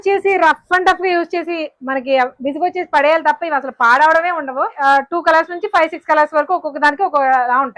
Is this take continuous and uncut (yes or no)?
no